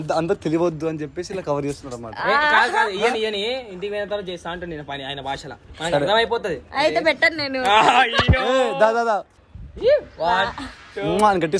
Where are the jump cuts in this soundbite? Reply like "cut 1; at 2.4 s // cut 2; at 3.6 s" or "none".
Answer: cut 1; at 9.4 s